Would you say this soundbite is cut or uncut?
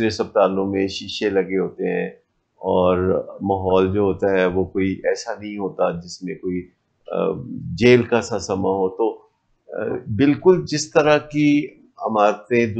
uncut